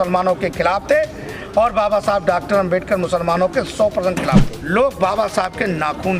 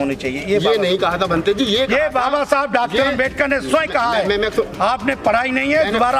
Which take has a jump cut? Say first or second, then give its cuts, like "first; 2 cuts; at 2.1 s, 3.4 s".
first; 1 cut; at 4.5 s